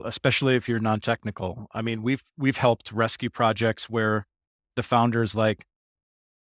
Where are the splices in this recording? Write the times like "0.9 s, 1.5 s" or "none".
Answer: none